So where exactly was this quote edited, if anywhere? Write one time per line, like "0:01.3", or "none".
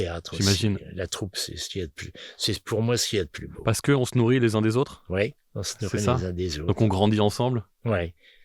0:03.4